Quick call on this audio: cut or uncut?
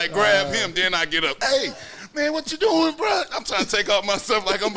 uncut